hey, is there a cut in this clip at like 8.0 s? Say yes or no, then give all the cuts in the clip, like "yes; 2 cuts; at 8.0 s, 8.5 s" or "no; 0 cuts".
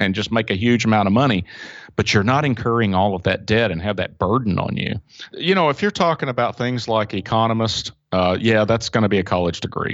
no; 1 cut; at 5.3 s